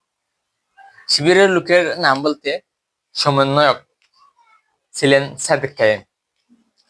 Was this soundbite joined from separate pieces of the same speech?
no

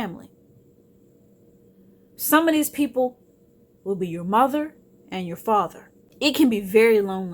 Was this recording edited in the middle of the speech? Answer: yes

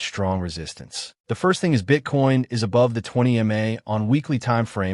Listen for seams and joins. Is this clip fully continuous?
no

